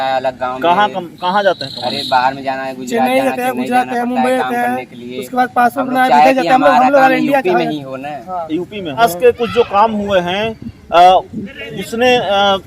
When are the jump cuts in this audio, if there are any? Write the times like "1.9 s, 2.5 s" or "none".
9.0 s